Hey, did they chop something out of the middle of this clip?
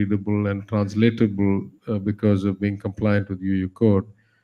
no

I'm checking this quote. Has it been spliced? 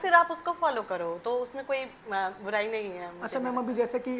no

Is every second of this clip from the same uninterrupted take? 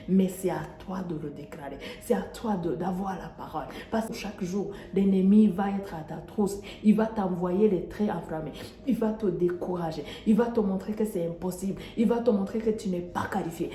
no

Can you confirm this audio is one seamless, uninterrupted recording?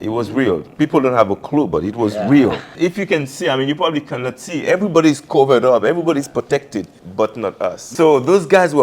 no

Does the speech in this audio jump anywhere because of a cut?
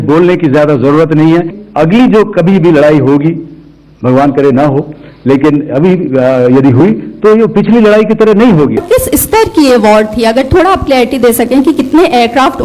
yes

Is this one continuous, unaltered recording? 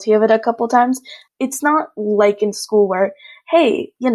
no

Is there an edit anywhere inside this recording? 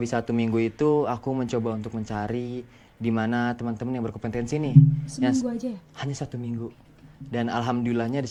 no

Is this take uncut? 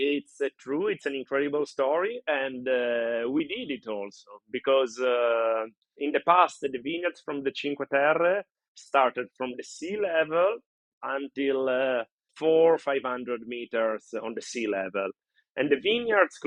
yes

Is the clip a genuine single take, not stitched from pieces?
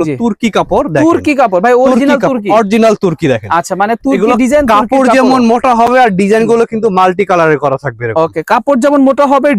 yes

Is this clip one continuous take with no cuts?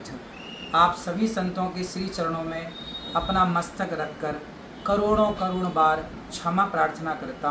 yes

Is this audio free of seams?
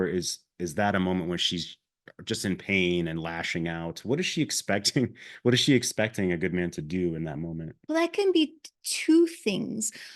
no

